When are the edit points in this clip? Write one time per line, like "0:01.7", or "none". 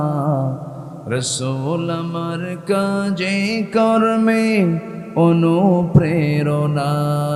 none